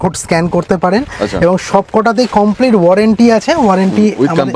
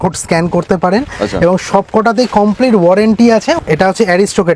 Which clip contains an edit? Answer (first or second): second